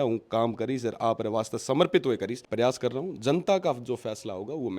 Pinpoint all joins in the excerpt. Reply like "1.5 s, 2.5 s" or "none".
2.4 s